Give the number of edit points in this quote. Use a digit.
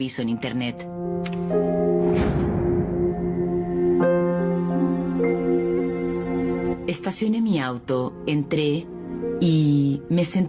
0